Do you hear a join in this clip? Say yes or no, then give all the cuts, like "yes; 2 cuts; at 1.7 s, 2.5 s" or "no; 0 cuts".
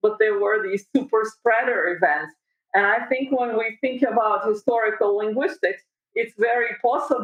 no; 0 cuts